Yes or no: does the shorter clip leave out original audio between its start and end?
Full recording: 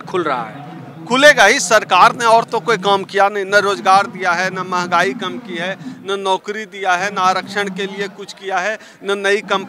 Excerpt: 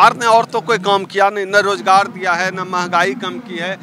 no